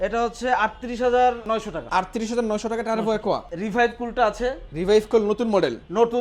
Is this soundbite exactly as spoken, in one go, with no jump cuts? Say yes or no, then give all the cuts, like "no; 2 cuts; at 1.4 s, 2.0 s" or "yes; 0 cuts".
no; 2 cuts; at 1.6 s, 3.5 s